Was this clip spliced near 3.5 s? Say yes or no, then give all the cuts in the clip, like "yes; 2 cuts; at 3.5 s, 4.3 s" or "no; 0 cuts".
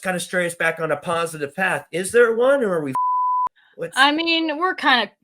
yes; 1 cut; at 3.5 s